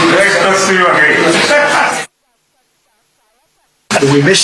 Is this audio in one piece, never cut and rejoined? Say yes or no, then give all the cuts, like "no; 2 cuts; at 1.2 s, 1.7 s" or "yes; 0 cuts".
no; 1 cut; at 1.3 s